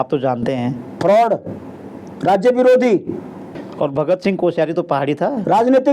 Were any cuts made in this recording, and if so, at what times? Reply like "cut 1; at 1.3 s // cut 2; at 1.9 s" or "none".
cut 1; at 3.6 s